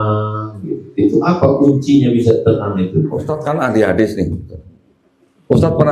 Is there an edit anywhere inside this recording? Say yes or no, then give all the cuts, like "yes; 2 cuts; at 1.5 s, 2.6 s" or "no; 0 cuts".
yes; 1 cut; at 3.2 s